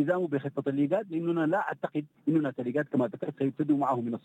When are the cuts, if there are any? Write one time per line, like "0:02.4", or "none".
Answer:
0:02.1